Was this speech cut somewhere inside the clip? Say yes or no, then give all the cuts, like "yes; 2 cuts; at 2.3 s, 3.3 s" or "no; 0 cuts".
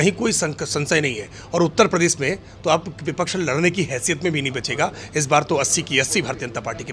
no; 0 cuts